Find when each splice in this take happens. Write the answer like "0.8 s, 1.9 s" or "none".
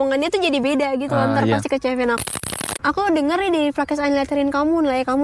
2.2 s